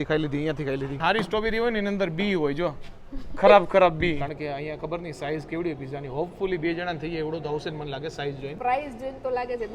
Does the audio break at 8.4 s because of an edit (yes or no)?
no